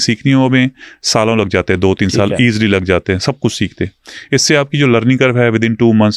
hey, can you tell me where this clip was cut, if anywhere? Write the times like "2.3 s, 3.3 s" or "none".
none